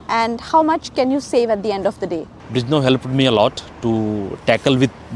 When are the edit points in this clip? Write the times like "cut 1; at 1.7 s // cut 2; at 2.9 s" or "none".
cut 1; at 2.3 s